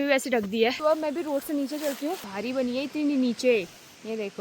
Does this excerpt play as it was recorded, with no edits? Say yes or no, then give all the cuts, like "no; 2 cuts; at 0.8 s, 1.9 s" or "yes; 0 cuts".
no; 2 cuts; at 0.8 s, 2.3 s